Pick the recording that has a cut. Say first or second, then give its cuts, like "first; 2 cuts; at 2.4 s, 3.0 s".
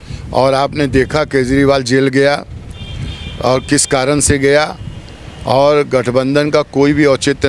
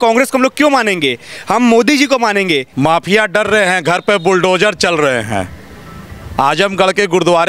second; 1 cut; at 2.7 s